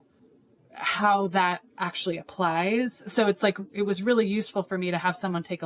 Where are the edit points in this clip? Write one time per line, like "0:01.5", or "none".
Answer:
none